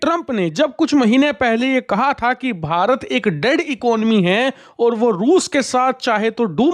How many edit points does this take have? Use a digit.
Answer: 0